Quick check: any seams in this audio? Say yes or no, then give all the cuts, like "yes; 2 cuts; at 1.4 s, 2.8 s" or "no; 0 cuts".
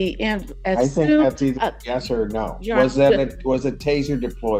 no; 0 cuts